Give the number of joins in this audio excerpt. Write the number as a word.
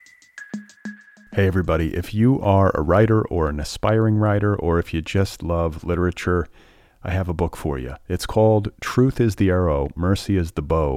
one